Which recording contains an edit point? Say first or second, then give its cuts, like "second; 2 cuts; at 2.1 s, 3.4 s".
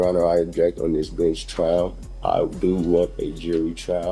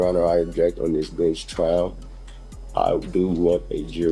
first; 1 cut; at 2.1 s